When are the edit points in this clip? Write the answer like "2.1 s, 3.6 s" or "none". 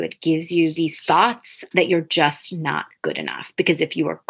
none